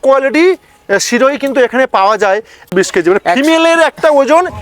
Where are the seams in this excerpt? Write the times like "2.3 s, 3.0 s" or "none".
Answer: 2.6 s

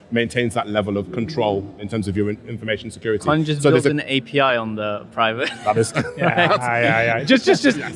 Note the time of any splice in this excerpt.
none

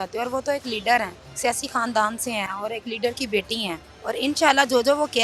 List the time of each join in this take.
1.2 s, 3.9 s

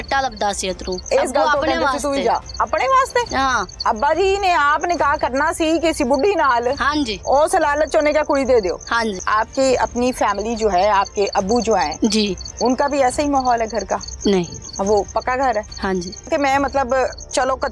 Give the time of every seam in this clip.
0.9 s, 3.7 s, 9.2 s, 16.3 s

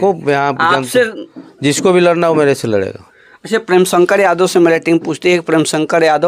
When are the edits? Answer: none

